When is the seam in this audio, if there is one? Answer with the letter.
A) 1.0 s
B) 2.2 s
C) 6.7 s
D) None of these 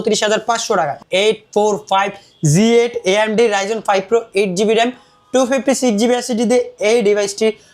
A